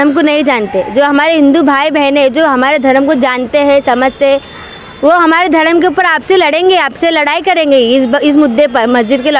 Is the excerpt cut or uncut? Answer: uncut